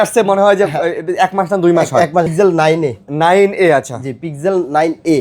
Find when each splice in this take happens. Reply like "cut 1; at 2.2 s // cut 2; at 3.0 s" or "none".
cut 1; at 2.3 s